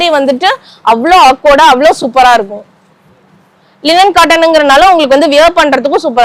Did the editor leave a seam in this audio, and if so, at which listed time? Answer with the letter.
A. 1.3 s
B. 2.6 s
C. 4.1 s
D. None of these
D